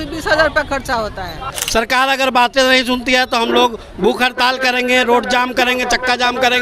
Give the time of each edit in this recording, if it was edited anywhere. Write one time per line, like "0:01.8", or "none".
0:01.4